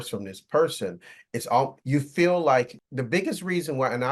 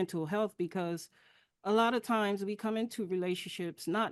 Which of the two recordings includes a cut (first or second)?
first